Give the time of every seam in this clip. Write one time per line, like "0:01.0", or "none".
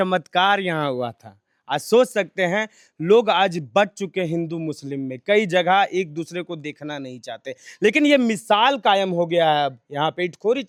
none